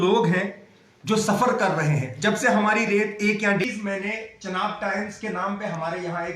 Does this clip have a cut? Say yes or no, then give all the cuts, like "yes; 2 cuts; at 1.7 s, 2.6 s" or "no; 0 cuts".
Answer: yes; 1 cut; at 3.6 s